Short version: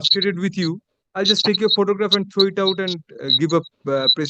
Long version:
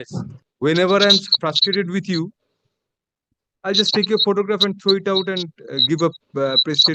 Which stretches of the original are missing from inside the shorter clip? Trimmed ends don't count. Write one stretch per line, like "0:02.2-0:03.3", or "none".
0:02.5-0:03.4